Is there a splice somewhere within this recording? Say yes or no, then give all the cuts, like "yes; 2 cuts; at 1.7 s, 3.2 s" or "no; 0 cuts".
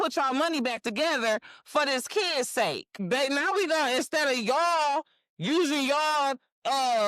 yes; 1 cut; at 2.9 s